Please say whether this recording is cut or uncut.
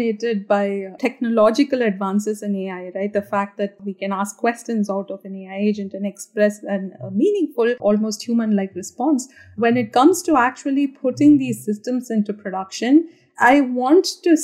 cut